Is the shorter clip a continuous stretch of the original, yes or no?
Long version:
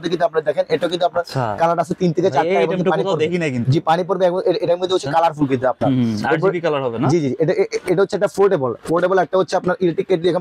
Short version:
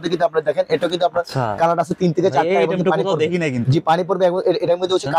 yes